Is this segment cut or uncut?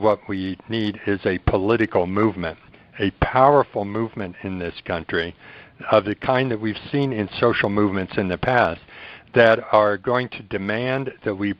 uncut